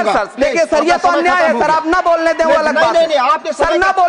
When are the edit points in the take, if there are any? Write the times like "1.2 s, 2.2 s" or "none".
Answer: none